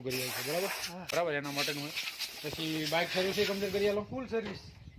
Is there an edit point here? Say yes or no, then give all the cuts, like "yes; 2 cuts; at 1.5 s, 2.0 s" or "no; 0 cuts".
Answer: yes; 1 cut; at 0.9 s